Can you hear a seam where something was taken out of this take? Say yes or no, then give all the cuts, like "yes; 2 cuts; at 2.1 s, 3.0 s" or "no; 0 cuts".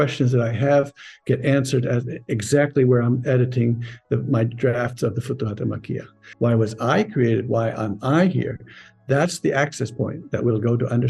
yes; 1 cut; at 6.2 s